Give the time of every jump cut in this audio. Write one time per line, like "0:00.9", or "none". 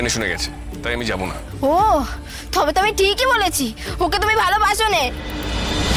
none